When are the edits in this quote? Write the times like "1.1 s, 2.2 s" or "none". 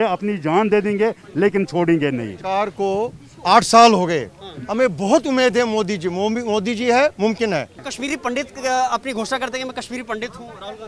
2.3 s, 7.8 s